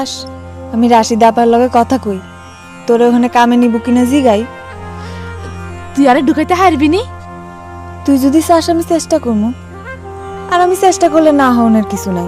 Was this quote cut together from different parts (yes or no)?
no